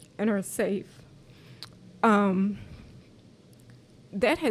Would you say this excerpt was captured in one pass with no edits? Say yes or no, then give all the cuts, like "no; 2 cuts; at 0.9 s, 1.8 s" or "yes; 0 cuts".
yes; 0 cuts